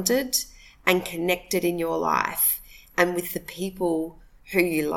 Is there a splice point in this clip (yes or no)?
no